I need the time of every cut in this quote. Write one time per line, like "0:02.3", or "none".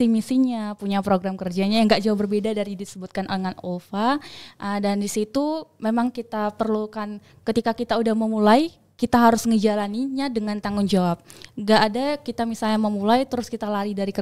none